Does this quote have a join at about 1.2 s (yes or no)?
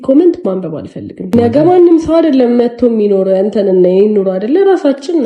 yes